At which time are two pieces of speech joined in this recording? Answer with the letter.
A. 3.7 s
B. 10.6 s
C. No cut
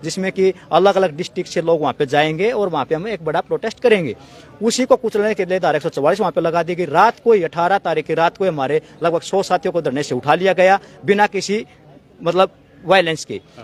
C